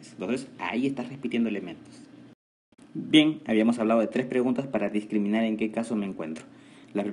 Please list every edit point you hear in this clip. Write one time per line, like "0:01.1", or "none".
none